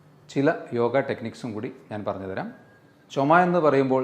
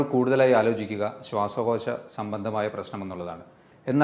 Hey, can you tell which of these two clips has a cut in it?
first; 1 cut; at 3.0 s

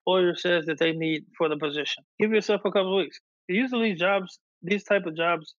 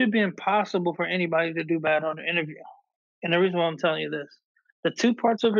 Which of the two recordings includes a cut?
first; 1 cut; at 2.0 s

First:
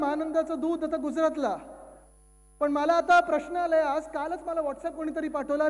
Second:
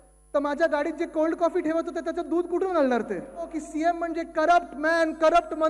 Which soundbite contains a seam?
second; 1 cut; at 3.6 s

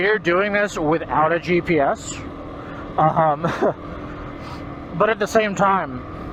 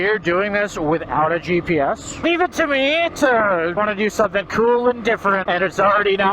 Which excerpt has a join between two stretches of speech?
second; 3 cuts; at 2.2 s, 3.8 s, 5.4 s

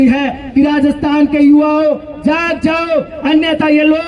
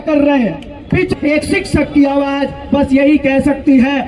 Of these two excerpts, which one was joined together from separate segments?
second; 1 cut; at 1.1 s

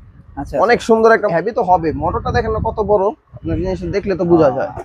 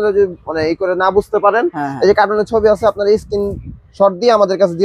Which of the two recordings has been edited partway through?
first; 1 cut; at 1.3 s

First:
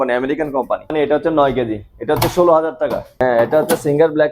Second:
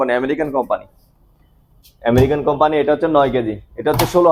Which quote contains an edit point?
first; 2 cuts; at 0.9 s, 3.2 s

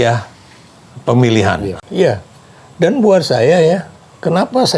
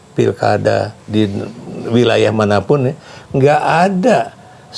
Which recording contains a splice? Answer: first; 1 cut; at 1.8 s

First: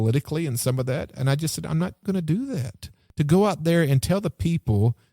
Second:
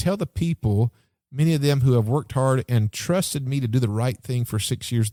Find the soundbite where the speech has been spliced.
first; 2 cuts; at 2.0 s, 3.0 s

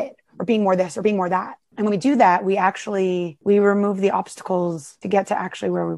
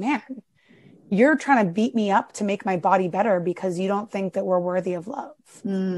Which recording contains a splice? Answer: first; 3 cuts; at 1.6 s, 3.3 s, 4.9 s

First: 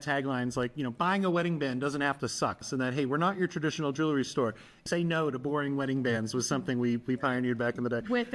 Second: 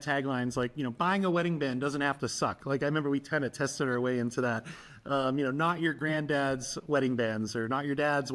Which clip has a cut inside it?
first; 2 cuts; at 2.6 s, 4.8 s

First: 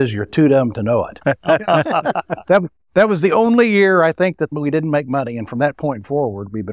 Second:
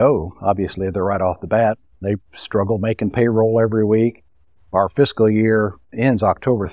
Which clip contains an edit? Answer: first; 1 cut; at 4.5 s

